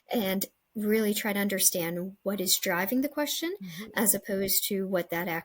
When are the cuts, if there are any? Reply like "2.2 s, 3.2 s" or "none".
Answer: none